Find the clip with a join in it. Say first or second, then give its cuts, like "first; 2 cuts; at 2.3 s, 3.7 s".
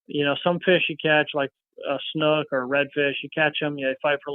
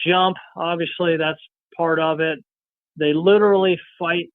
second; 1 cut; at 2.8 s